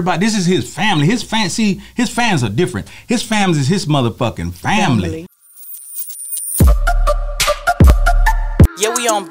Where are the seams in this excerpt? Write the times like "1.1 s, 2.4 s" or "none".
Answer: 5.3 s